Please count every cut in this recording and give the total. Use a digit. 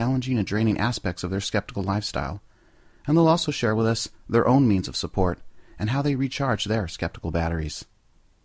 1